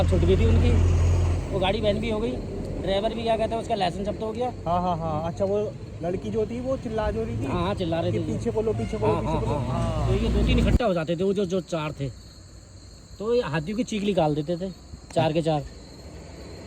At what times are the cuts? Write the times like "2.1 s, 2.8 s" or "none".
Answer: 10.8 s